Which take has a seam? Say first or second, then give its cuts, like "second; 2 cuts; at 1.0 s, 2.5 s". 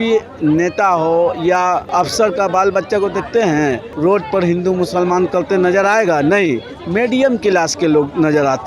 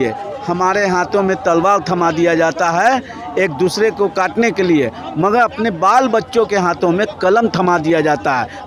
first; 2 cuts; at 1.9 s, 3.9 s